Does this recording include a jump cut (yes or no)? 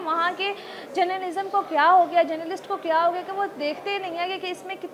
no